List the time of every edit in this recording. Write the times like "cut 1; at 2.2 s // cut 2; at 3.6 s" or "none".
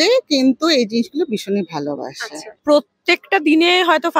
cut 1; at 2.5 s